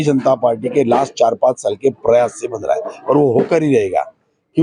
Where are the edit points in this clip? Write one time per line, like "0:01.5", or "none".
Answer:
none